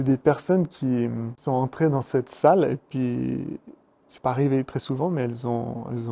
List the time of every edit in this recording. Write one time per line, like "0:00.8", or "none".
0:01.3

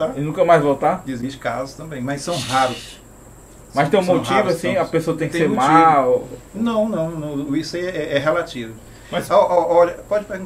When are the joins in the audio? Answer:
none

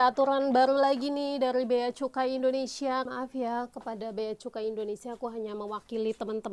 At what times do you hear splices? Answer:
0:03.1

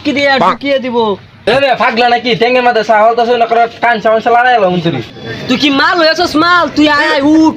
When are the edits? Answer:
0:01.4

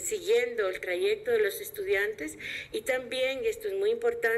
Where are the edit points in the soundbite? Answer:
none

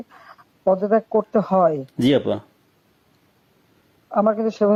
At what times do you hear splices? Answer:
none

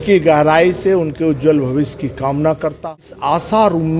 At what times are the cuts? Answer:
0:03.1

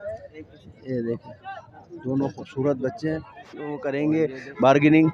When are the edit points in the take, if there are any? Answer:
0:03.8

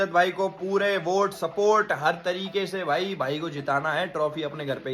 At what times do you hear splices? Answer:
none

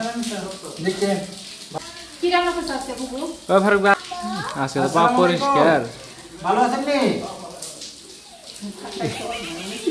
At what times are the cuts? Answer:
0:01.7
0:03.9

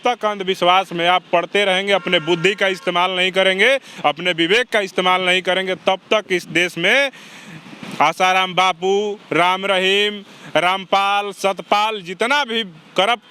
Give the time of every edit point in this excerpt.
none

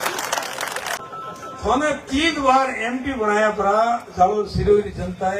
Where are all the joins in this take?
0:01.0

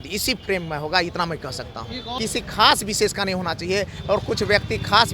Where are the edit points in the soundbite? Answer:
0:02.1

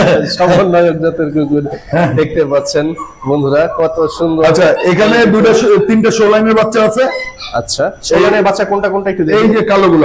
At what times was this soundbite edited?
none

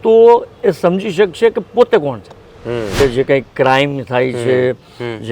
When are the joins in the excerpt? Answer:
0:03.0

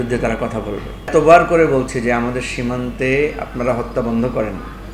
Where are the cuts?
0:01.1

